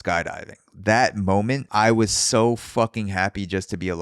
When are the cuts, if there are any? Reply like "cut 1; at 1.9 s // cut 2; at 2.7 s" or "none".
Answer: cut 1; at 1.6 s